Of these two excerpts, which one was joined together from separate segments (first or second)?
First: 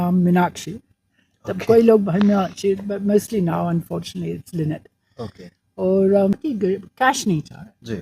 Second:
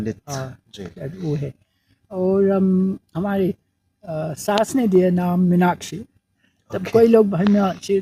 first